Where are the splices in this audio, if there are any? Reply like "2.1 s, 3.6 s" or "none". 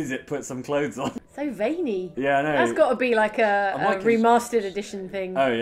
1.1 s, 2.1 s